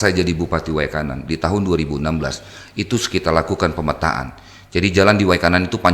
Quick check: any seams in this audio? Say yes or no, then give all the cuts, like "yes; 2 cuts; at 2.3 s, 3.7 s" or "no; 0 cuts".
no; 0 cuts